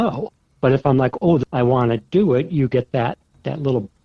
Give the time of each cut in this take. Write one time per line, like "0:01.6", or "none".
0:01.4

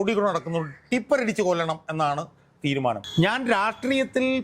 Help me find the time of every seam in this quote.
0:03.0

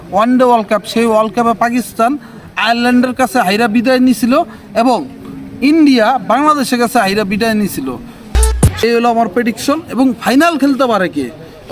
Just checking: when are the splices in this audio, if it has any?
0:08.3

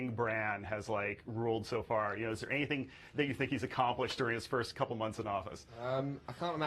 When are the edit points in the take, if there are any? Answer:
none

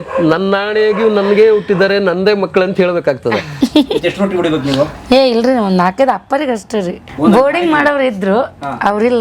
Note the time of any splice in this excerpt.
0:03.5
0:07.0

